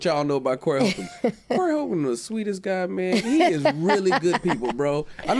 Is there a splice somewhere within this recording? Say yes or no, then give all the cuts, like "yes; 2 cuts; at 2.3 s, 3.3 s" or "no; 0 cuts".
no; 0 cuts